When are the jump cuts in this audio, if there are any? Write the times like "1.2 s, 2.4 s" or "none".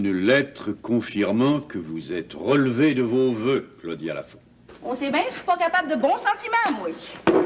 4.7 s